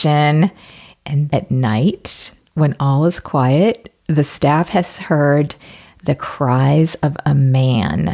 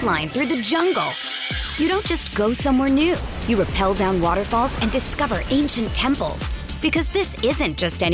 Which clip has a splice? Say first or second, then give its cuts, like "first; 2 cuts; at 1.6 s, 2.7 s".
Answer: first; 1 cut; at 1.3 s